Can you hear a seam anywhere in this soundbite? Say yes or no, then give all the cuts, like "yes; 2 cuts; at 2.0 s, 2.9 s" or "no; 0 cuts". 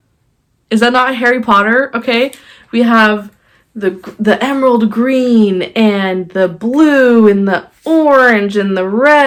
no; 0 cuts